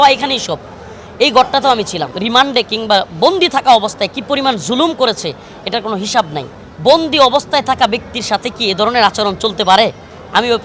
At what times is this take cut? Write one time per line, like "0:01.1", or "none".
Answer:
0:02.1
0:06.6